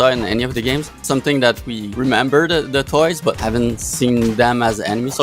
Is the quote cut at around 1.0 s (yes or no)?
yes